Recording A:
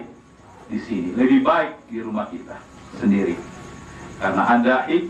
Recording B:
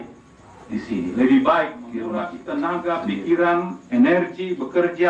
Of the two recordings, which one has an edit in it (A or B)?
B